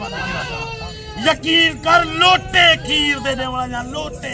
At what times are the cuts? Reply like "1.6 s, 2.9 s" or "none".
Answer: none